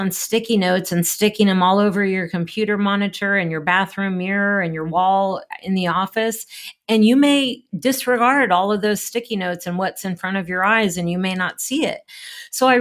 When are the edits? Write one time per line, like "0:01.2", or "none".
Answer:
none